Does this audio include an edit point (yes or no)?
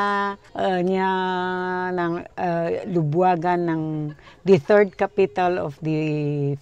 no